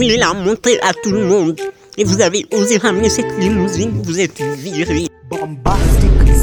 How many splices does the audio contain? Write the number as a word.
zero